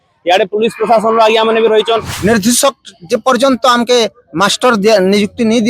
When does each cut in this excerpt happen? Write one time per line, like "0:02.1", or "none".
0:02.2